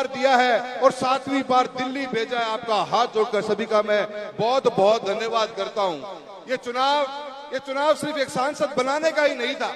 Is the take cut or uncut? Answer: uncut